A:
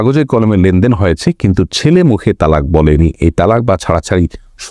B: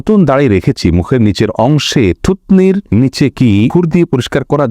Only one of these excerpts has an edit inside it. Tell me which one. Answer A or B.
B